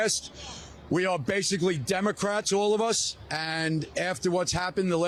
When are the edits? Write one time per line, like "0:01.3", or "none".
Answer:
none